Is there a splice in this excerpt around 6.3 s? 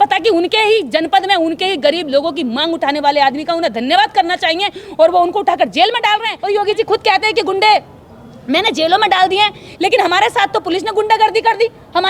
yes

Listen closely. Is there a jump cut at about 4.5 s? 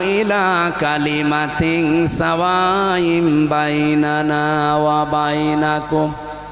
no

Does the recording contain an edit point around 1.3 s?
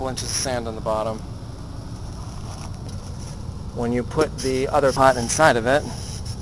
yes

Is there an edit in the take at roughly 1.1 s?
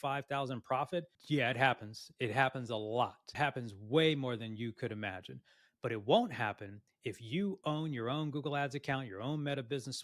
no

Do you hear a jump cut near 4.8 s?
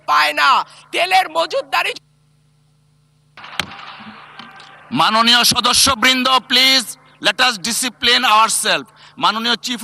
no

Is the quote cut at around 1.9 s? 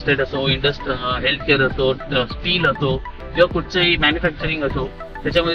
no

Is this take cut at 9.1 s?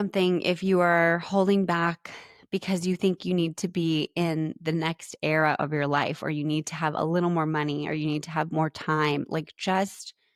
no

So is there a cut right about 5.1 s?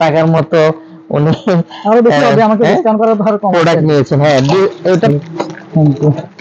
yes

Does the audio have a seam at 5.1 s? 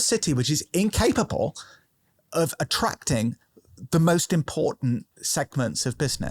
no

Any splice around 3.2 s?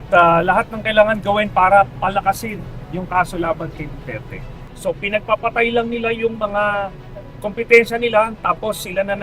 no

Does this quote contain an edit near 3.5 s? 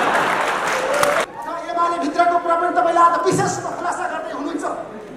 no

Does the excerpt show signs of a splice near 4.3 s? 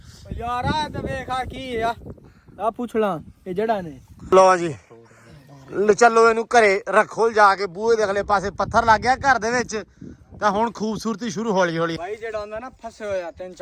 yes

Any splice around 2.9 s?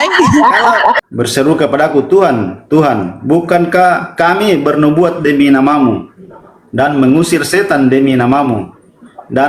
no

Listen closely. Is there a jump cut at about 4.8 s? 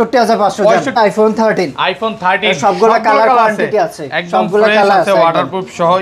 no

